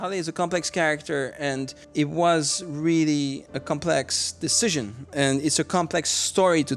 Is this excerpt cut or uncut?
cut